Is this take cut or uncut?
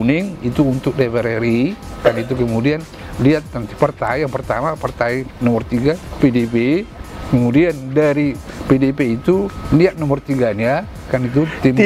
uncut